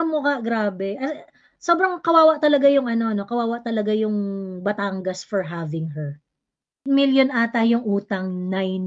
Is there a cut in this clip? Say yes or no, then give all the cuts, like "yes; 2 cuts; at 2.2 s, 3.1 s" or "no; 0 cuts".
yes; 1 cut; at 6.8 s